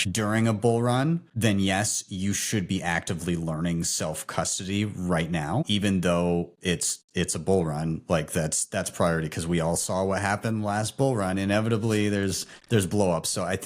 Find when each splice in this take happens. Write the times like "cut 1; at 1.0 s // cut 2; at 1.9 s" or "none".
cut 1; at 1.3 s